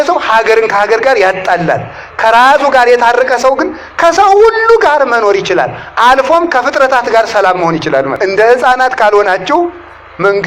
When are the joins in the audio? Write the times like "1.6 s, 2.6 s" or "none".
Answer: 8.1 s